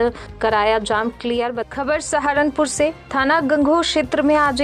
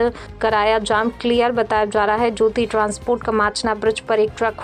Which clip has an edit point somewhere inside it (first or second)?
first